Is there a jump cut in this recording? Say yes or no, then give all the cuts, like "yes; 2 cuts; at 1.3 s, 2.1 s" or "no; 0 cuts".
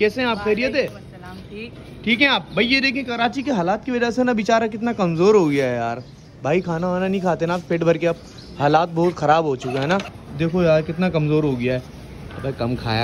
yes; 1 cut; at 10.2 s